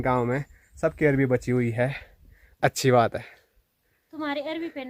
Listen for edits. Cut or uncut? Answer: uncut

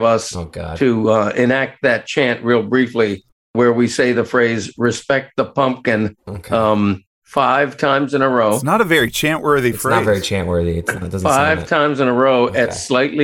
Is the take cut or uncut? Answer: cut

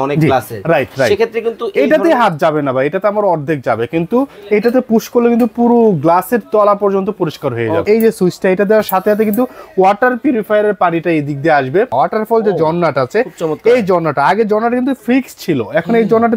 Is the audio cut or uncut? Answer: cut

